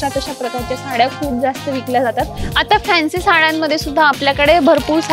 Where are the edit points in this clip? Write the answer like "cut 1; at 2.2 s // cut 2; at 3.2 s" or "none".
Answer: cut 1; at 2.4 s